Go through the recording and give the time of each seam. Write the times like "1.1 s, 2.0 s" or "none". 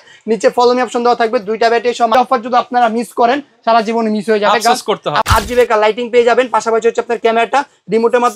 2.1 s, 5.2 s